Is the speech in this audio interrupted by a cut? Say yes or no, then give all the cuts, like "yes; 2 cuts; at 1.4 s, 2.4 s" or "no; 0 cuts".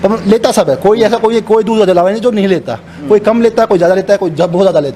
no; 0 cuts